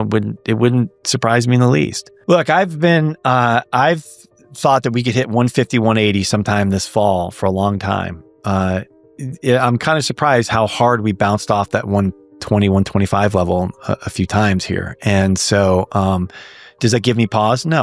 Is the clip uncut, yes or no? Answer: no